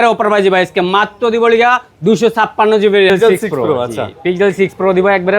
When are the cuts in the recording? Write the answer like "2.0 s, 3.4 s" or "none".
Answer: 3.1 s